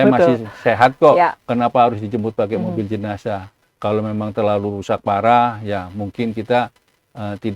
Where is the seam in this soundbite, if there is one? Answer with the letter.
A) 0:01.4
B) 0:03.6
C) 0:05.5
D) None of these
B